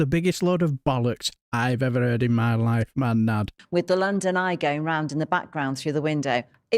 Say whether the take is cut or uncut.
cut